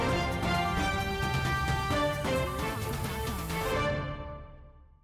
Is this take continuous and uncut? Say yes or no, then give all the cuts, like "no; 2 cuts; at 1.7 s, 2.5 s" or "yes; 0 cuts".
yes; 0 cuts